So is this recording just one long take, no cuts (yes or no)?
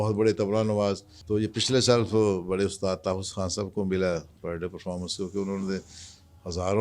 no